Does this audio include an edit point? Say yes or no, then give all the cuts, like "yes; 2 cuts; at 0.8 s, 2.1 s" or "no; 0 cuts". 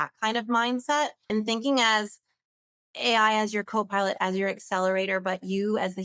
yes; 1 cut; at 1.3 s